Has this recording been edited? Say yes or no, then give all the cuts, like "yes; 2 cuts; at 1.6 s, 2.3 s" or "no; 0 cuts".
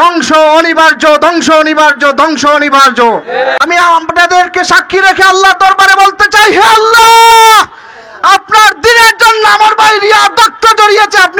yes; 1 cut; at 3.6 s